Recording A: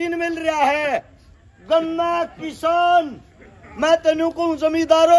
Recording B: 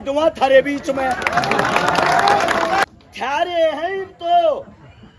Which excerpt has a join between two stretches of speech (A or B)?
B